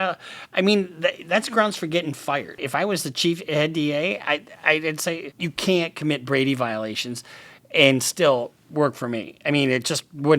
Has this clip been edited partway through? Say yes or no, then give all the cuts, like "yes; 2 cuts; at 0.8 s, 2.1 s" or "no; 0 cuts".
yes; 2 cuts; at 2.6 s, 5.3 s